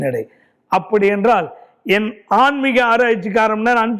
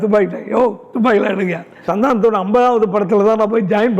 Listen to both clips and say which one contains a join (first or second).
second